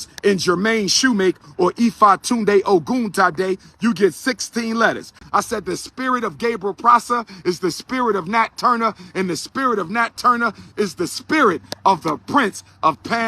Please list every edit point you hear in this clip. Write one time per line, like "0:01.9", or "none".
0:05.1